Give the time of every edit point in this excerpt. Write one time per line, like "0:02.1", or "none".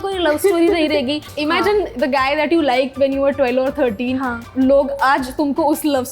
0:01.3
0:04.5